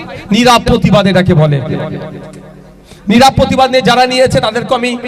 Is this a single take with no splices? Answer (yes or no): yes